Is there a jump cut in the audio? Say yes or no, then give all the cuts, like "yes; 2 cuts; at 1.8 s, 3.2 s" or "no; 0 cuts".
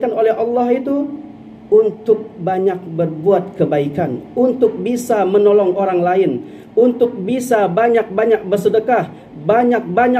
no; 0 cuts